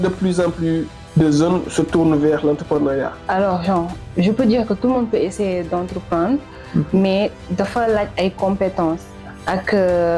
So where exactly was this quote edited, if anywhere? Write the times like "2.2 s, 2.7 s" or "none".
1.0 s, 3.2 s